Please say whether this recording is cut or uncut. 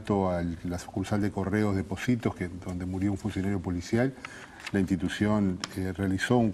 cut